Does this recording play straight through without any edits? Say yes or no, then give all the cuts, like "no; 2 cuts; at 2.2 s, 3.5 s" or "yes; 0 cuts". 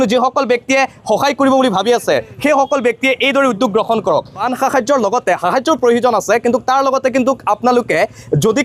no; 1 cut; at 4.4 s